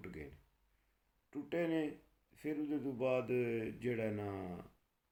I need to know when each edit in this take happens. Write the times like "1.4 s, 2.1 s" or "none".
none